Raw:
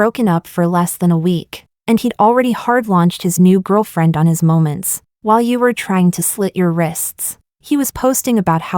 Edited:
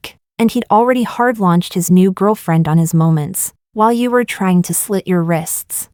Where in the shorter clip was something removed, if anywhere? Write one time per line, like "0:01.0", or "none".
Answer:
none